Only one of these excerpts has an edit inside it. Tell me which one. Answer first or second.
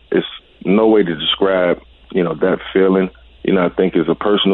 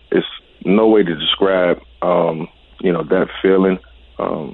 first